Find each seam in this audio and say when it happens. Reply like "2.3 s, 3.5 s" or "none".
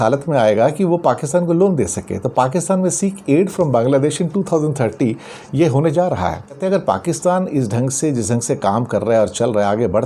6.6 s

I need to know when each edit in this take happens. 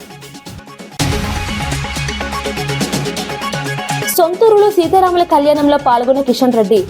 none

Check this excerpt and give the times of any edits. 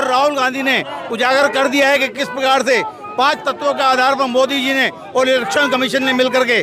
none

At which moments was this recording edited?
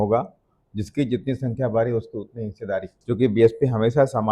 2.9 s

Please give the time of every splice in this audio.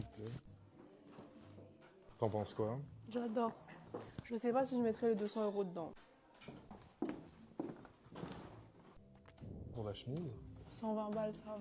3.2 s

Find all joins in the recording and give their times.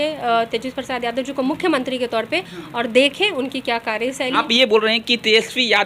4.3 s

